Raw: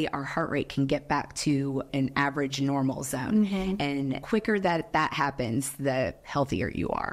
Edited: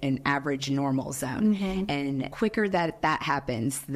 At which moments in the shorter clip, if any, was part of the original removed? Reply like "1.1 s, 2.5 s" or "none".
none